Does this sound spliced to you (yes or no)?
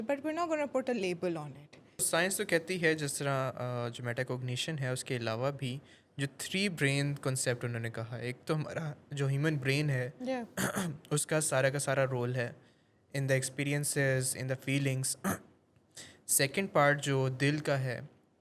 yes